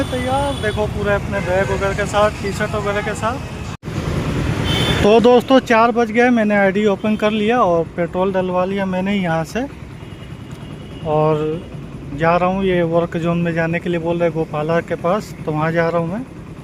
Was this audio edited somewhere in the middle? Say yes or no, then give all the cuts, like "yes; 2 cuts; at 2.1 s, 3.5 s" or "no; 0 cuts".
no; 0 cuts